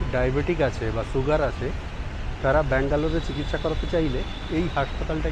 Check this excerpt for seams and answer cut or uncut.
uncut